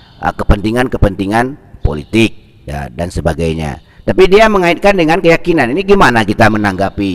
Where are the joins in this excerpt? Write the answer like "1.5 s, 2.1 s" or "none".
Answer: none